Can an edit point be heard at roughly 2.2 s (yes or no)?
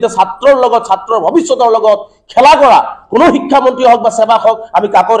no